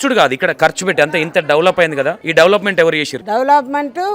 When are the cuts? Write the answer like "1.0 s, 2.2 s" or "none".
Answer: 2.2 s, 3.1 s

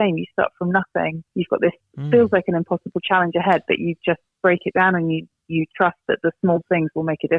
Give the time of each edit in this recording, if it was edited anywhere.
none

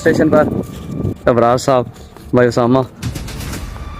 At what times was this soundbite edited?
1.2 s

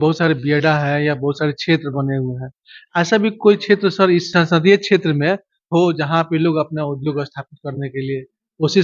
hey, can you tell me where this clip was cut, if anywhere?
none

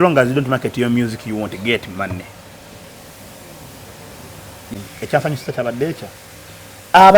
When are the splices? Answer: 4.7 s

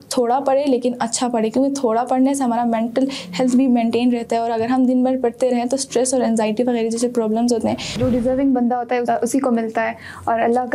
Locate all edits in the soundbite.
8.0 s

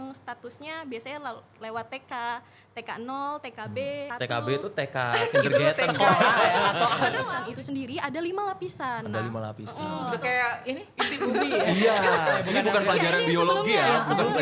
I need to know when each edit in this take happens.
4.1 s, 7.3 s, 10.0 s, 12.4 s

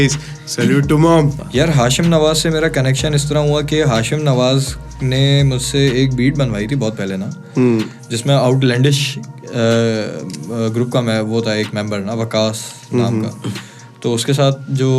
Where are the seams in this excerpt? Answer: 1.4 s

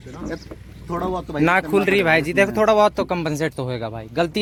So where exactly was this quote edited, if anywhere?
none

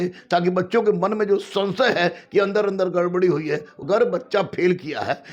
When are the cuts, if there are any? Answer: 3.7 s

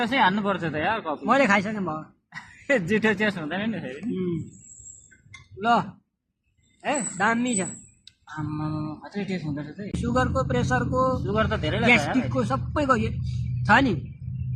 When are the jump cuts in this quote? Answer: 2.8 s

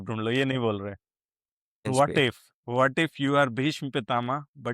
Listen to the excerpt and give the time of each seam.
1.8 s

